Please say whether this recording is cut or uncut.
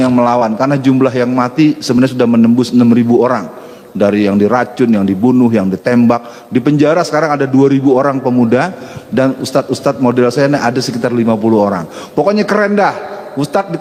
uncut